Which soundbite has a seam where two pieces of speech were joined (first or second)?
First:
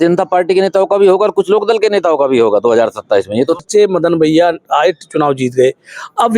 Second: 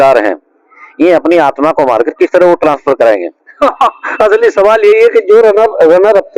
first